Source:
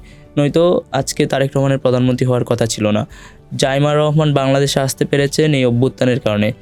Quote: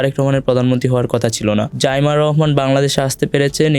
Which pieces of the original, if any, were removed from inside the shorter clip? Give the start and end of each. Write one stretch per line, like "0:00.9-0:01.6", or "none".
0:03.1-0:03.5